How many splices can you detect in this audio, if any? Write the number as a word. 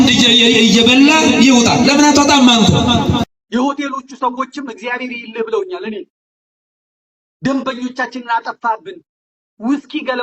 one